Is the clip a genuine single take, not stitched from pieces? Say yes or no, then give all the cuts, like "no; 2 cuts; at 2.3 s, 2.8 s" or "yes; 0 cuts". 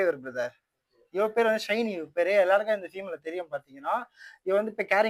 yes; 0 cuts